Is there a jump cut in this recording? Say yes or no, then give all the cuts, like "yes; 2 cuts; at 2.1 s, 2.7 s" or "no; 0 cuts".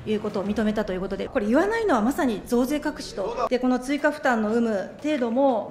yes; 2 cuts; at 1.2 s, 3.5 s